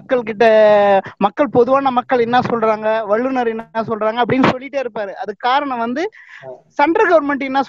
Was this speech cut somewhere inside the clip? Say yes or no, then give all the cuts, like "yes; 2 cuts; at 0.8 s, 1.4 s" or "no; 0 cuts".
no; 0 cuts